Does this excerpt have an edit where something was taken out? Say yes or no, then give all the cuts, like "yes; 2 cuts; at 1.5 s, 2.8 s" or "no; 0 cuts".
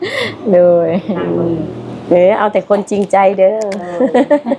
yes; 1 cut; at 1.2 s